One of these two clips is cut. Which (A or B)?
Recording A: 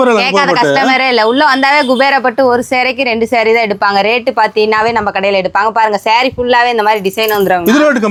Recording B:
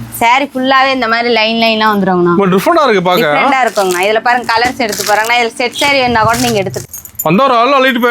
B